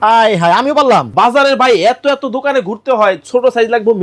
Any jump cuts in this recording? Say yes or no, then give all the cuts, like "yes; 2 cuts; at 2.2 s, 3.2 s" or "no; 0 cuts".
yes; 1 cut; at 1.1 s